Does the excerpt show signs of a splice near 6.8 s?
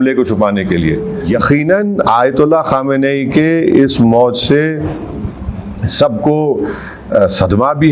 no; 1 cut; at 1.3 s

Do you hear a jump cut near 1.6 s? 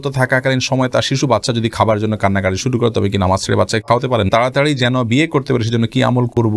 no; 1 cut; at 4.3 s

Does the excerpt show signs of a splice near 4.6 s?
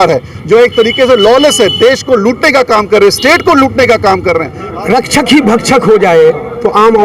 yes; 1 cut; at 4.6 s

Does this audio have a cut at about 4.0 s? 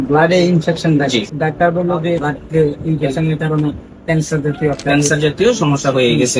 no; 2 cuts; at 1.3 s, 2.3 s

